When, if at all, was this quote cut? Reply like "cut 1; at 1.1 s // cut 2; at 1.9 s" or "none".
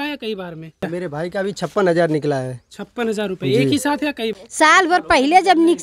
cut 1; at 0.9 s // cut 2; at 4.4 s